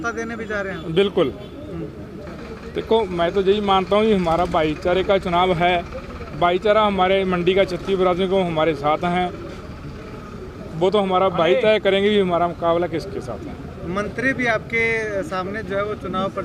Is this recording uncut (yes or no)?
no